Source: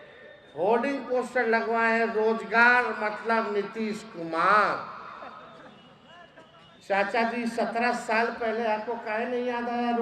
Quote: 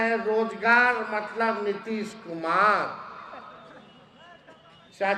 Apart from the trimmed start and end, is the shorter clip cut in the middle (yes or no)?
no